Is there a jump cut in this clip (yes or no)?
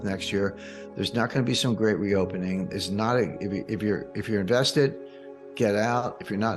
no